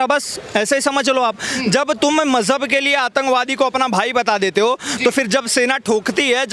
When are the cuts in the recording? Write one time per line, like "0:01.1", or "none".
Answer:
none